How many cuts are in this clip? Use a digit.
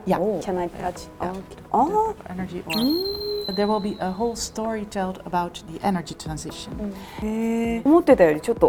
0